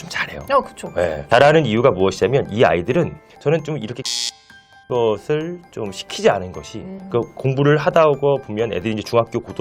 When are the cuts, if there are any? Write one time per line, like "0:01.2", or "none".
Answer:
0:03.2